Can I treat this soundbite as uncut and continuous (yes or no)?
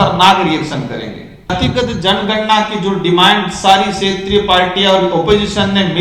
no